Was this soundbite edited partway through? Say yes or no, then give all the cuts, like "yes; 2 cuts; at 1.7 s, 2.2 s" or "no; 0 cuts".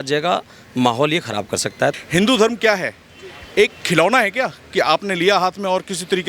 yes; 1 cut; at 1.9 s